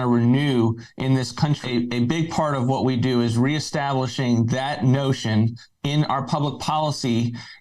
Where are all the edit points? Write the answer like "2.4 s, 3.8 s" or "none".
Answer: 1.6 s